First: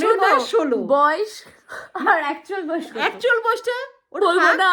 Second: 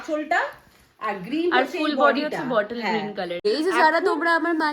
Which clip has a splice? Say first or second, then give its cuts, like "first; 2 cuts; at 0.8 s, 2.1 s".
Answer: second; 1 cut; at 3.4 s